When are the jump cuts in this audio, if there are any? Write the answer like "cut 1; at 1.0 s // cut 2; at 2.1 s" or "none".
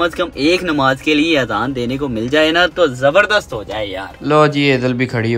cut 1; at 4.1 s